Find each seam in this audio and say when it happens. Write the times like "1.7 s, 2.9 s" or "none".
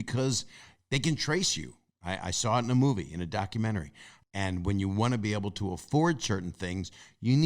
4.1 s